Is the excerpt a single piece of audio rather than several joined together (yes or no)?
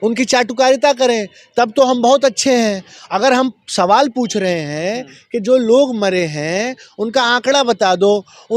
yes